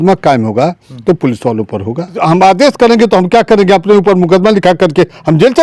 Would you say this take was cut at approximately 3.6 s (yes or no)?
no